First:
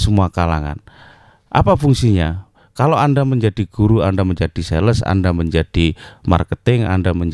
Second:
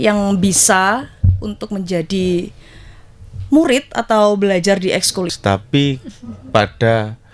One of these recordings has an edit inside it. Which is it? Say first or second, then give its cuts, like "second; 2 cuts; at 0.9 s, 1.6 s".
second; 1 cut; at 5.3 s